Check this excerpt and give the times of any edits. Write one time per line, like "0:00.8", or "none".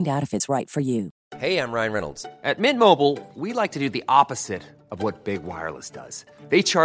0:01.2